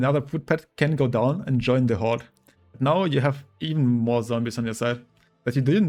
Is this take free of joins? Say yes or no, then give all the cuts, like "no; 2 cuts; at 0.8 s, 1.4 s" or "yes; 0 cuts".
yes; 0 cuts